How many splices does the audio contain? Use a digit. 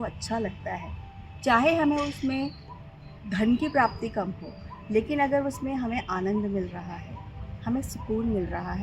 0